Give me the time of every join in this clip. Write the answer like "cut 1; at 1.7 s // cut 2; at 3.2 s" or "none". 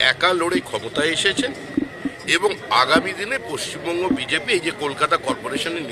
none